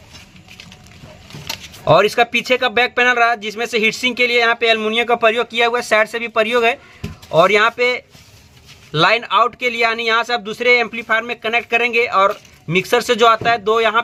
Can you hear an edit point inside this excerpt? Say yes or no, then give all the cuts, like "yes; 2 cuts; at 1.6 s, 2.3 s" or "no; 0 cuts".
no; 0 cuts